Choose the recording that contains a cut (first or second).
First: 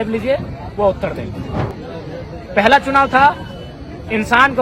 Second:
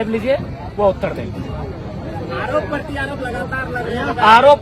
first